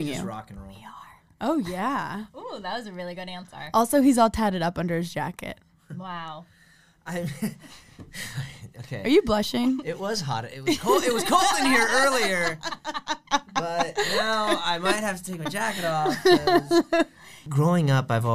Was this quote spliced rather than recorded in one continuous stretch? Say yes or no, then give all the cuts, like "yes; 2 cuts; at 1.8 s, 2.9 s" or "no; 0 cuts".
yes; 1 cut; at 17.4 s